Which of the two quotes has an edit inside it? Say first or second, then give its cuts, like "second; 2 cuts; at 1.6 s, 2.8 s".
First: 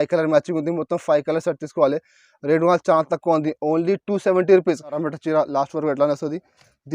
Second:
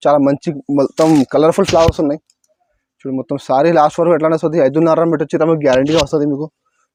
first; 1 cut; at 5.0 s